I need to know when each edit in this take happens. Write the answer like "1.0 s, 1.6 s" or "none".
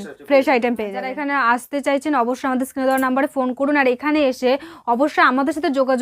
1.2 s